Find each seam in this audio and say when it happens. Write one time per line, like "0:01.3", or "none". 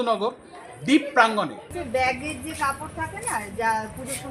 0:01.7